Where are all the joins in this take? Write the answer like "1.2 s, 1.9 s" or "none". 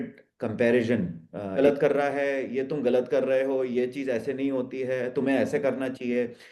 1.5 s